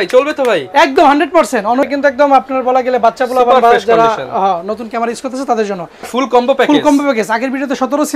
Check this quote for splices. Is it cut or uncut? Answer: cut